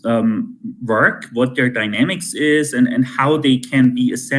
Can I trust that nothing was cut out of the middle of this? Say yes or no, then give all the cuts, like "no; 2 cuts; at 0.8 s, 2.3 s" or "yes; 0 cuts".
yes; 0 cuts